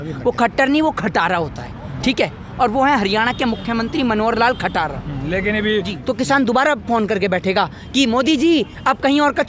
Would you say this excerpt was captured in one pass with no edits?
no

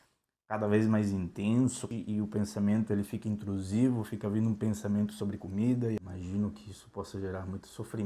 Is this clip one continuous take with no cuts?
no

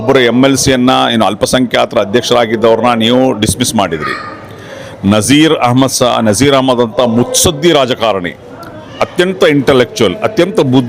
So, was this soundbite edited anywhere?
no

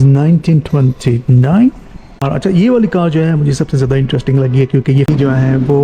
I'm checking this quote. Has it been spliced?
yes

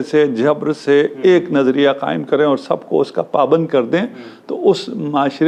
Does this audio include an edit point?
no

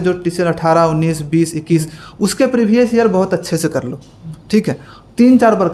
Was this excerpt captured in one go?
yes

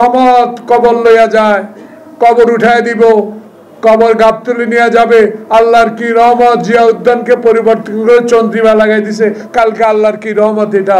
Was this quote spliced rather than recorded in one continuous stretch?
no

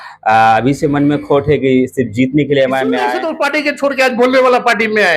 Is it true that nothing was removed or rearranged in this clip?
no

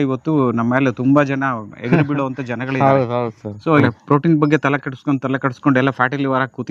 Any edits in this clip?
yes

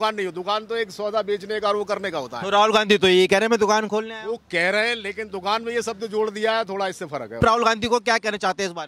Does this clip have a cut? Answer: yes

